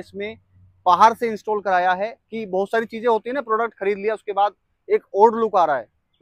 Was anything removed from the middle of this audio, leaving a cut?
no; 0 cuts

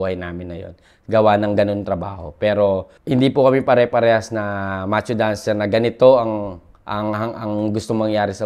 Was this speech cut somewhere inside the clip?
yes; 1 cut; at 2.9 s

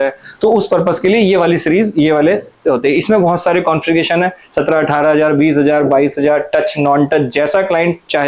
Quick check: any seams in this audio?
no; 0 cuts

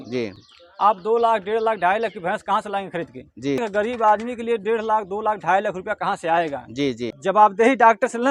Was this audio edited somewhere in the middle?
yes; 2 cuts; at 3.6 s, 7.1 s

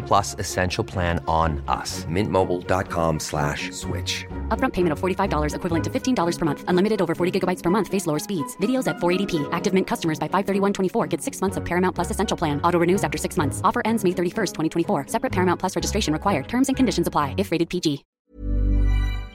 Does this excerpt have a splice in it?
yes; 1 cut; at 18.1 s

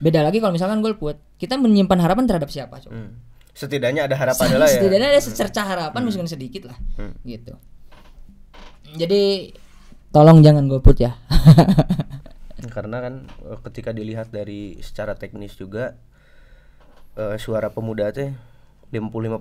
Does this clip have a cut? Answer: no; 0 cuts

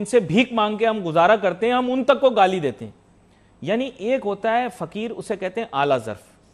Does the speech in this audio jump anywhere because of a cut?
no; 0 cuts

